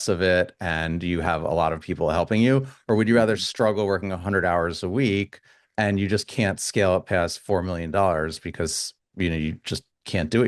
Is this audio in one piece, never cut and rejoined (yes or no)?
yes